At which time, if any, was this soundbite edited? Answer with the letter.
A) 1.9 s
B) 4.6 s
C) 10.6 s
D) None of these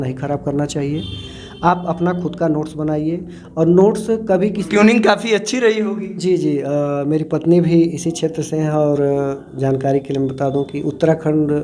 B